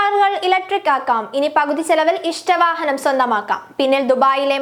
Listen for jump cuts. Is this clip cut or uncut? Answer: uncut